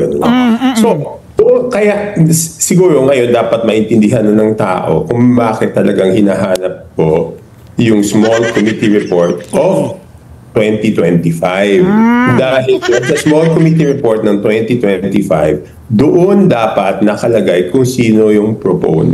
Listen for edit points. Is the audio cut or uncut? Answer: uncut